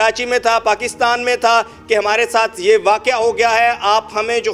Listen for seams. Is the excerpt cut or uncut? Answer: uncut